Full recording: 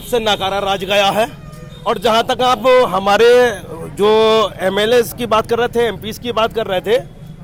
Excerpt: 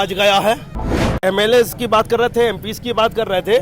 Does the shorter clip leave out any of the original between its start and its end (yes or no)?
yes